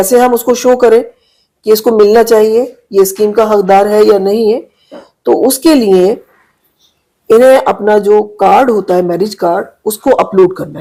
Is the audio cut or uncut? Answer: uncut